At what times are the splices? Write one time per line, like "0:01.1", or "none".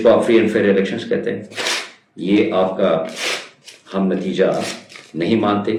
none